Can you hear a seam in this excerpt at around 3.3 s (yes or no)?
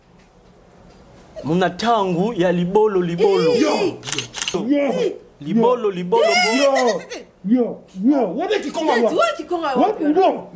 no